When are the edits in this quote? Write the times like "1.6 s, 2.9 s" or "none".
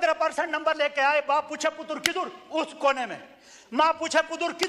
none